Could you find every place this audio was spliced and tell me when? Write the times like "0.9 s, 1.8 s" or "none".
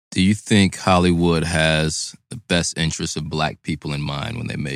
none